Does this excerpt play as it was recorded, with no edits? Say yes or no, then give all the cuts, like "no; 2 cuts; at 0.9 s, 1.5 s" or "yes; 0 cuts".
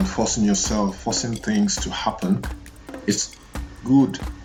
yes; 0 cuts